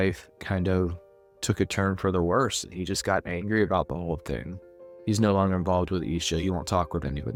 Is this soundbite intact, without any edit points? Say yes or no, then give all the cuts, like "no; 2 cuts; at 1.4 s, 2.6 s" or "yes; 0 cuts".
yes; 0 cuts